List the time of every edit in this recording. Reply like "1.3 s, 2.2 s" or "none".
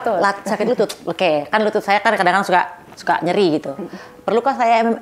1.0 s

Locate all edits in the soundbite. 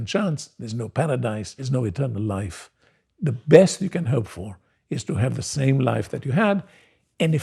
1.5 s

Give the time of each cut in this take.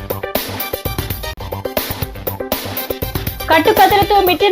3.2 s

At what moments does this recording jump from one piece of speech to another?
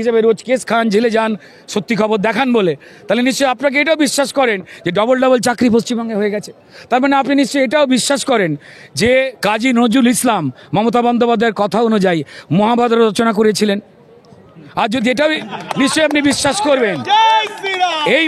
none

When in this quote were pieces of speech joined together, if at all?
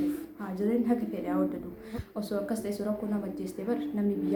none

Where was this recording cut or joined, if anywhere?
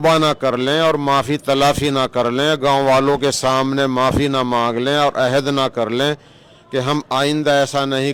none

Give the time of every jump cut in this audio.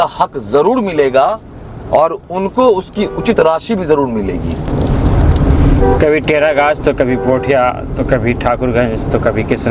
none

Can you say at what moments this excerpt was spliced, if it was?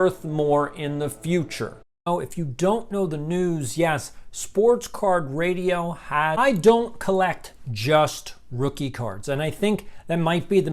2.0 s, 6.3 s

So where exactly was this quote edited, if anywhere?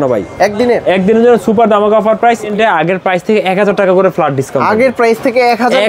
2.5 s

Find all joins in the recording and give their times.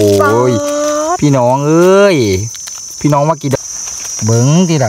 3.6 s

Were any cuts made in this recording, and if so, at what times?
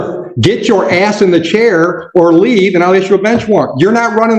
none

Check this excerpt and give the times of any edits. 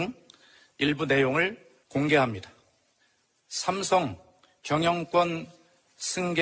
2.0 s

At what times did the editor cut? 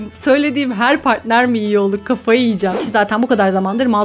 2.8 s

